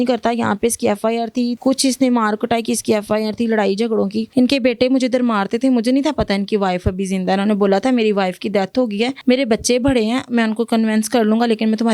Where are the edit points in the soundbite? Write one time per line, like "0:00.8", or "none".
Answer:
0:01.6
0:04.2
0:09.2